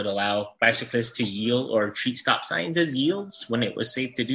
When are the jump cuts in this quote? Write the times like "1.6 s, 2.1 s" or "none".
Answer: none

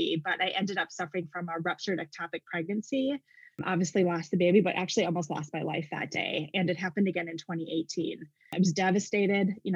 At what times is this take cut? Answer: 8.5 s

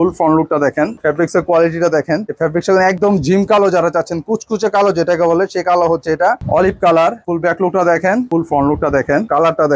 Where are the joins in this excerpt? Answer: 3.0 s, 6.4 s

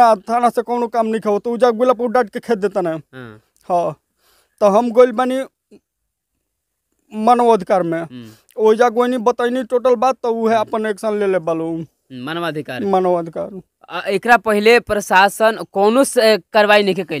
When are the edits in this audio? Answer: none

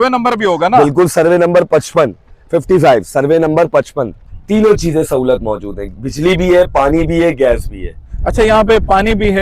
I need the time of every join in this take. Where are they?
4.4 s

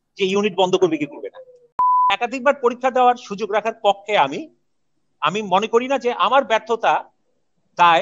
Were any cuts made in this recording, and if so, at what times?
1.8 s

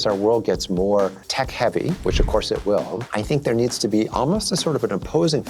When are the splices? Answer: 1.2 s, 3.0 s

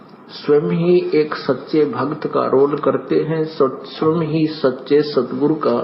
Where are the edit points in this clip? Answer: 2.2 s

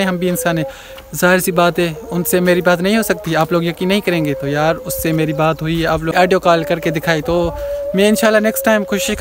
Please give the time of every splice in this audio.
6.1 s

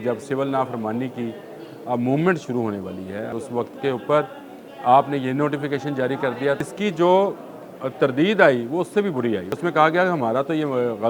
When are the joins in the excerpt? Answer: 3.3 s, 6.6 s, 9.5 s

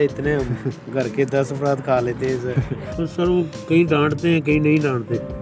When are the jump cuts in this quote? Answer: 2.8 s

